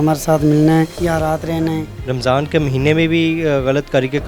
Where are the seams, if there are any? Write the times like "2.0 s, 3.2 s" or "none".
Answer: 0.9 s, 1.9 s